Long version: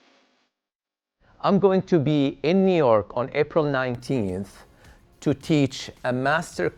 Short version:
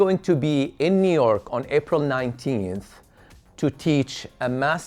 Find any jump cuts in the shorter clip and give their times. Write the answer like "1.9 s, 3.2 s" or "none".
none